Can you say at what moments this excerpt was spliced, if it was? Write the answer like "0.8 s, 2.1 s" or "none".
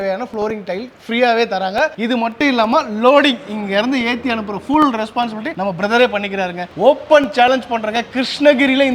none